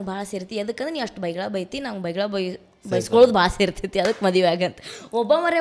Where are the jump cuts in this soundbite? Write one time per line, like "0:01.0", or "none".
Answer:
none